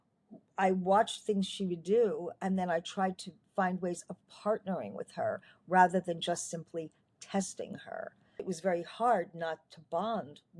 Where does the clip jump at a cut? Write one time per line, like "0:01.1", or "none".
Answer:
0:08.5

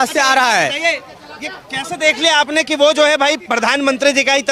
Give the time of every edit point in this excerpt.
none

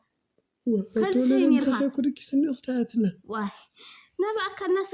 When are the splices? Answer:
none

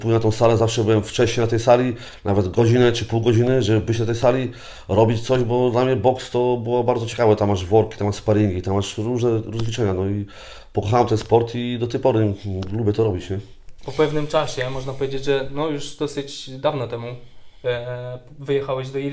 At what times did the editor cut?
none

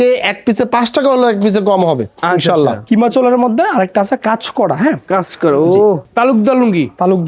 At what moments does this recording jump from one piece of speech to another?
0:02.8
0:06.1

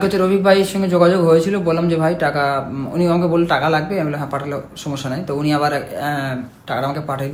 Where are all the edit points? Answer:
none

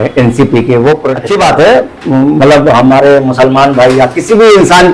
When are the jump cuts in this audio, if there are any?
0:01.2

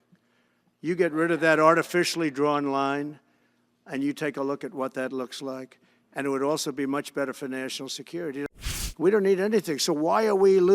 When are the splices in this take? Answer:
0:08.4

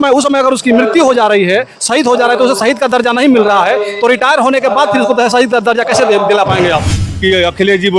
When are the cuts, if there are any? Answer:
0:06.9

